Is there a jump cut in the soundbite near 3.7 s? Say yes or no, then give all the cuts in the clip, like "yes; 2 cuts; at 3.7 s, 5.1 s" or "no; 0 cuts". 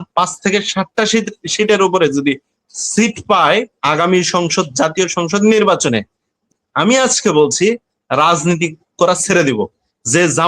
yes; 2 cuts; at 3.7 s, 6.5 s